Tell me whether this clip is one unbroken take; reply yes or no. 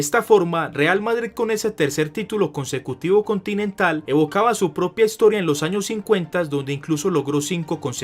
yes